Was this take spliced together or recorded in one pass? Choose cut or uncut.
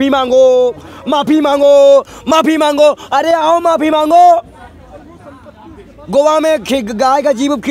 uncut